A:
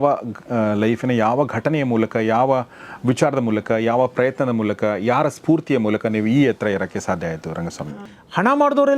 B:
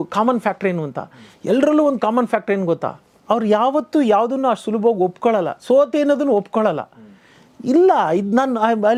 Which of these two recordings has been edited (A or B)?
A